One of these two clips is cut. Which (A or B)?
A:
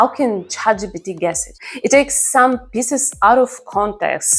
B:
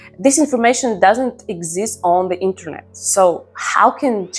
A